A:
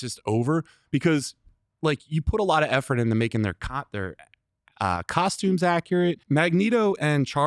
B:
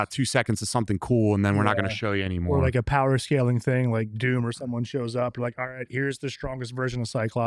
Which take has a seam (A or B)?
A